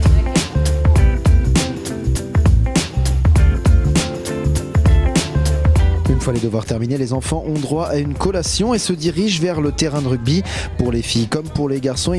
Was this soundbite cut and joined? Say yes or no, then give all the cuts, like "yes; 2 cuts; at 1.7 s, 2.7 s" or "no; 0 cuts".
no; 0 cuts